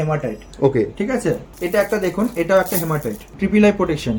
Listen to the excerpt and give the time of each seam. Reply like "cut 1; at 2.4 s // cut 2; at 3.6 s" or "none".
cut 1; at 1.5 s // cut 2; at 3.2 s